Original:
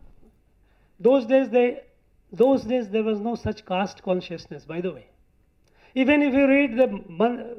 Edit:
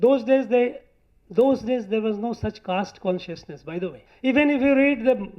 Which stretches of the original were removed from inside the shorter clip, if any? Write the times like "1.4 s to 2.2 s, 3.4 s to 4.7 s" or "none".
5.1 s to 5.8 s

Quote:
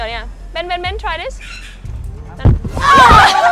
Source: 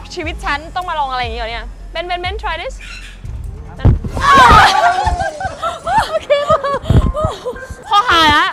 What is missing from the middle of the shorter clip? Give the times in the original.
none

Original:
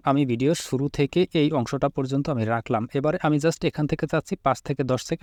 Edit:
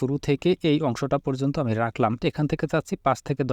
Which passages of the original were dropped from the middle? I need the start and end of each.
2.9 s to 3.6 s

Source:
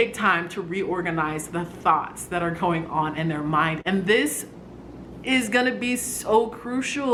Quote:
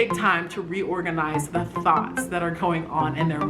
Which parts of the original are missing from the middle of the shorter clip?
none

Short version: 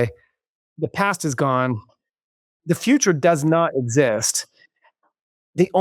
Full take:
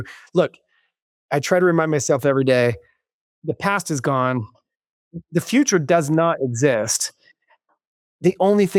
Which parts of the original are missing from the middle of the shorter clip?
none

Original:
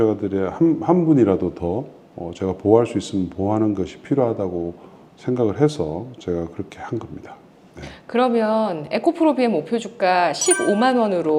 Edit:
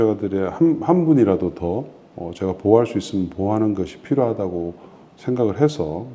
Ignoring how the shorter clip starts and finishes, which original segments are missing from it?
none

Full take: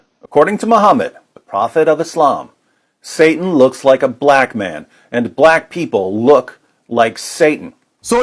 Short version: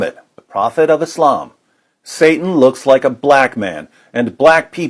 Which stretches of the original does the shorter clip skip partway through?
none

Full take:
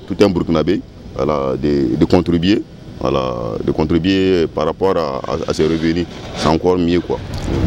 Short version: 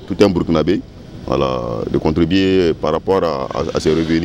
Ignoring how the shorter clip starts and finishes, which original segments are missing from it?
1.0 s to 2.8 s

